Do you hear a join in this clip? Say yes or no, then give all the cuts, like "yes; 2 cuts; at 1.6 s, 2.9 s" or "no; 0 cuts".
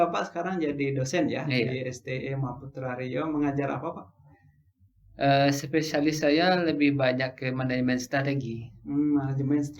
no; 0 cuts